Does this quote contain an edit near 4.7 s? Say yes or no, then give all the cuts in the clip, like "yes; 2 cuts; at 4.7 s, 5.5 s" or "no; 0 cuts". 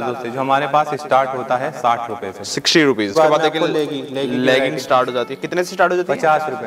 no; 1 cut; at 3.1 s